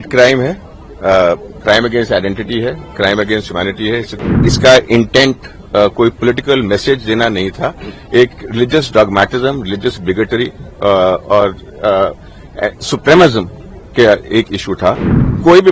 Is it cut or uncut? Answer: cut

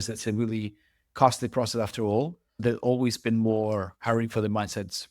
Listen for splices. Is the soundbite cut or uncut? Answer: cut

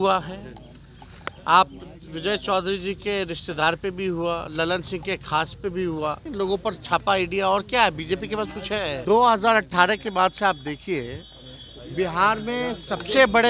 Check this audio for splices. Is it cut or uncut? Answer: cut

